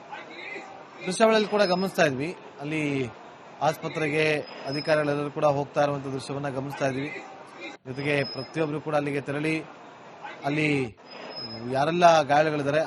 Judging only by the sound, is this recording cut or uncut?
cut